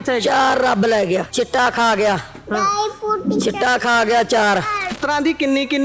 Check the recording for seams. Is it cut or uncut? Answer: cut